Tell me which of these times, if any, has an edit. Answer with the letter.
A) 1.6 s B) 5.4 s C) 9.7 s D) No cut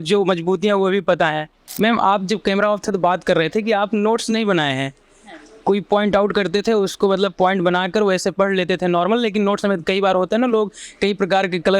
A